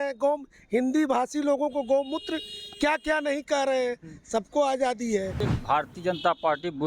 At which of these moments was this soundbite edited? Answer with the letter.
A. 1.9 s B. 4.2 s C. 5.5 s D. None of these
C